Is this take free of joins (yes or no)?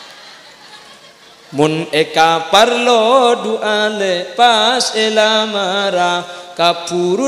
yes